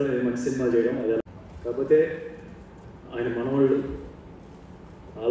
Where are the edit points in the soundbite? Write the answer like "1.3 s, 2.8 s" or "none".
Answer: 1.2 s